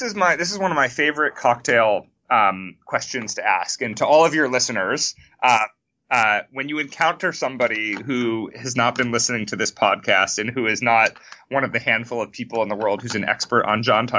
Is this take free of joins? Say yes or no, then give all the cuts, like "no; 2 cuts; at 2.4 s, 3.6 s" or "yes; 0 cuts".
yes; 0 cuts